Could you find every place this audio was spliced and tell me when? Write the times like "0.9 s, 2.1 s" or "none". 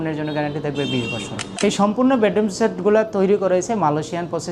1.4 s